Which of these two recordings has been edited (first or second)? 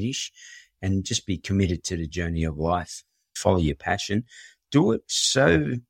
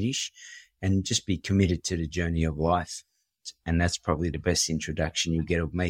first